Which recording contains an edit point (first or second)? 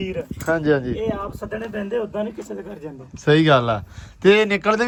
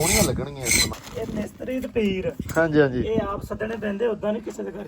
second